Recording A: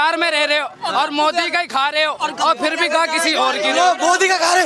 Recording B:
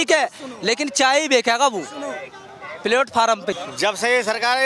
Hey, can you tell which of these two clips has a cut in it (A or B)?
B